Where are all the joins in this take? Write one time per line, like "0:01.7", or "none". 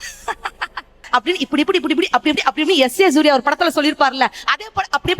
0:01.0